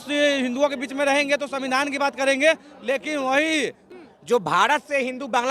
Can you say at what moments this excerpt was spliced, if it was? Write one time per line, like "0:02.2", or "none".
0:03.9